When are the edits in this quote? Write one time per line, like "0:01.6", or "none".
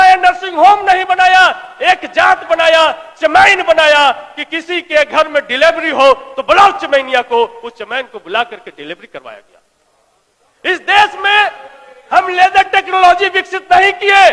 none